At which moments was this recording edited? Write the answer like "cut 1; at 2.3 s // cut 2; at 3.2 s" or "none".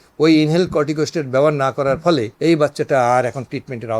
cut 1; at 2.3 s